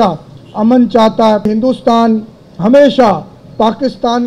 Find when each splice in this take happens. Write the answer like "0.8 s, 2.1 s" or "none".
1.5 s